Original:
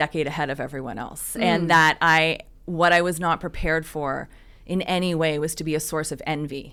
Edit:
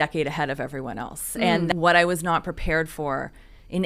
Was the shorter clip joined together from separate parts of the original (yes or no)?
yes